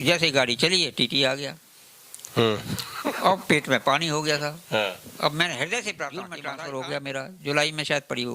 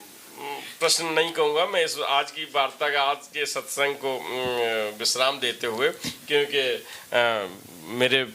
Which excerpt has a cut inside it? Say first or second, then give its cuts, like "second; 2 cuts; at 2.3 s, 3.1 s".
first; 1 cut; at 6.4 s